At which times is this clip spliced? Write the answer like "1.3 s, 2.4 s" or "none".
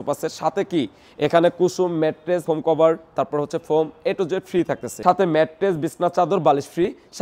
2.4 s, 5.0 s